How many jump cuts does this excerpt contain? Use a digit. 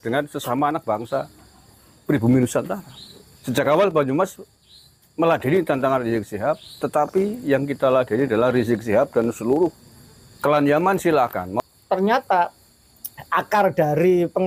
1